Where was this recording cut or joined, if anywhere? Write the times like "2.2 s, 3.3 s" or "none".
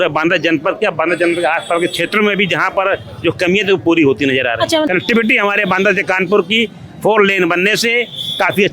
4.9 s